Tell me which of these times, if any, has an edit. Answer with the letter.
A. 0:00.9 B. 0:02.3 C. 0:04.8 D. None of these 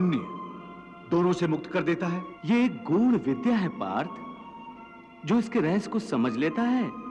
B